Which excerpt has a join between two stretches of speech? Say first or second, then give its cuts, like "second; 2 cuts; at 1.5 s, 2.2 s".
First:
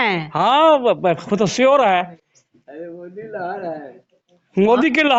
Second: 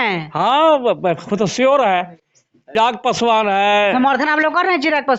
second; 1 cut; at 2.8 s